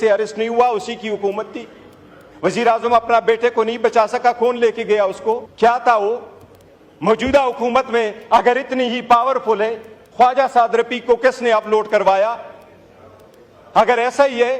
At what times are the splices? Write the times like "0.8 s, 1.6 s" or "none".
5.5 s